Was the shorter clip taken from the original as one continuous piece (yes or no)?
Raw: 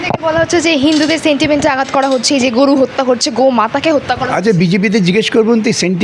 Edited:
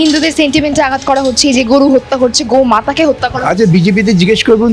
yes